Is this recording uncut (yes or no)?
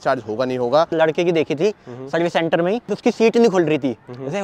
no